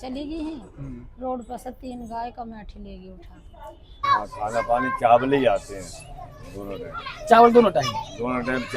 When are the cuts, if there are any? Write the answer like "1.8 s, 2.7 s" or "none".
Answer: 4.0 s